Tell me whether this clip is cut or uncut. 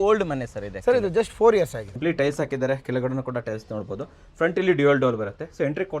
cut